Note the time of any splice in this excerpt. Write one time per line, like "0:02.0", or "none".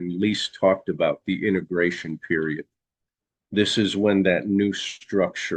none